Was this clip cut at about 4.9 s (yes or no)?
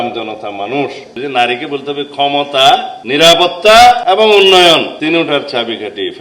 yes